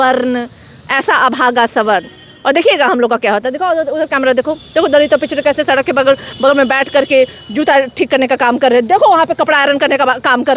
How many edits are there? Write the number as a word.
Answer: zero